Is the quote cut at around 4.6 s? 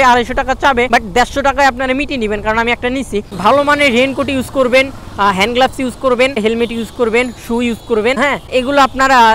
no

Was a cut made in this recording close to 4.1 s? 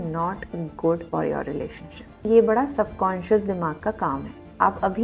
no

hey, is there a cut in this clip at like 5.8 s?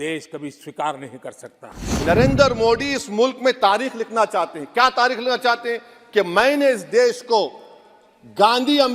no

